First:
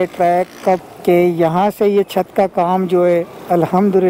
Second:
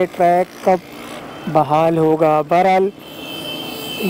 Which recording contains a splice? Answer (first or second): first